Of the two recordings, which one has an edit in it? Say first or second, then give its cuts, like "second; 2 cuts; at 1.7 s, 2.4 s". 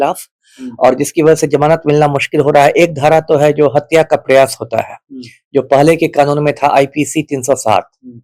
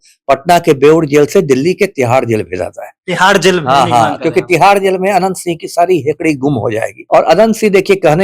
second; 1 cut; at 7.0 s